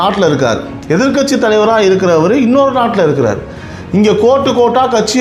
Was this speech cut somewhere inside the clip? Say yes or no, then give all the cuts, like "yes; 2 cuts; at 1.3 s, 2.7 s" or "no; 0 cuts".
no; 0 cuts